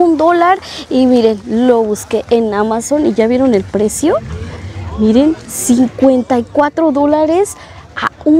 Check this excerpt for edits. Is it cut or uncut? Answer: uncut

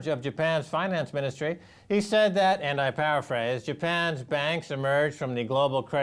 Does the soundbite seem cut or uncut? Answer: cut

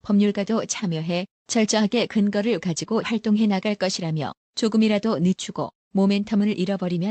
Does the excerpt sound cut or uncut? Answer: uncut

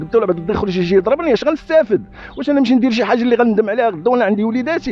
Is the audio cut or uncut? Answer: uncut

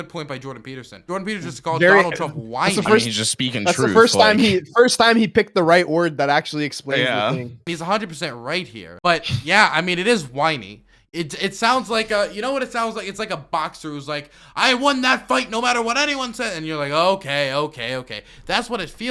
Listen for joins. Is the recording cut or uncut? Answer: cut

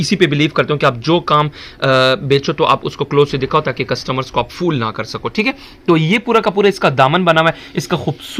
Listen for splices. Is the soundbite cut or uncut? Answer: uncut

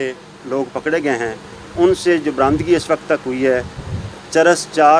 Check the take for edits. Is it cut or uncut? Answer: uncut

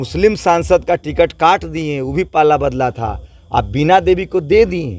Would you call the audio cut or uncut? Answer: uncut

